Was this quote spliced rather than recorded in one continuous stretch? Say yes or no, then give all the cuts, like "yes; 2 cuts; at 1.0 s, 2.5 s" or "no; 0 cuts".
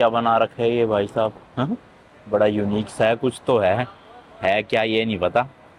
no; 0 cuts